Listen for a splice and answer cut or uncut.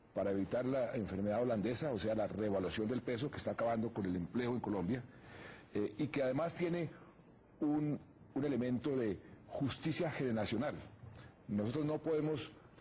cut